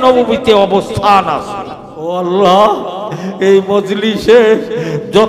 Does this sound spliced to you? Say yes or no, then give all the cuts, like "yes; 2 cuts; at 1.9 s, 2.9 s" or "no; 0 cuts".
yes; 1 cut; at 2.1 s